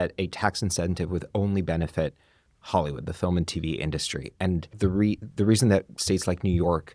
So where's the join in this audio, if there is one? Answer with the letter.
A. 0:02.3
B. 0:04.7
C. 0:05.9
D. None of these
B